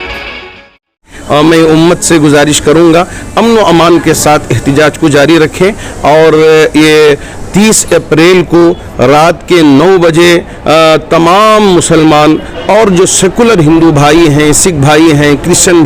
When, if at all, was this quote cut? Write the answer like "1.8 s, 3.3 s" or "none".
1.1 s